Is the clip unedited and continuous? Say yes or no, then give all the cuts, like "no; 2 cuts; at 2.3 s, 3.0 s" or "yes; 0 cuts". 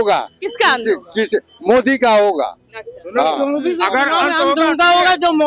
yes; 0 cuts